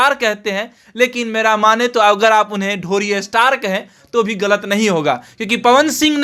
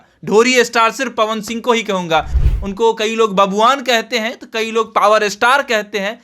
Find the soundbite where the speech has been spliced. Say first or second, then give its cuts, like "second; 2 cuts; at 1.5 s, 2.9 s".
second; 1 cut; at 2.4 s